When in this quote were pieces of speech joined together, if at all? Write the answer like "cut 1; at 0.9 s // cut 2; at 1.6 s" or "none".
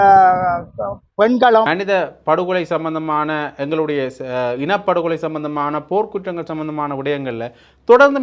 cut 1; at 1.7 s